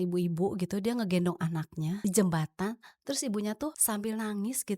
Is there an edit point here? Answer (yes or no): yes